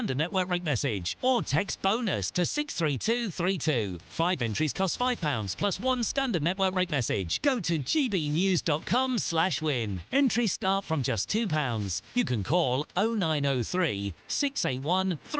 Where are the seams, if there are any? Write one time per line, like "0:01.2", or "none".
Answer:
0:01.1